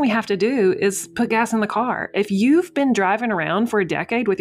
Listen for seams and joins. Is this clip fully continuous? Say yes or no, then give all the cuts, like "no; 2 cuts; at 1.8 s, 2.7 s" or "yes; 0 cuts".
yes; 0 cuts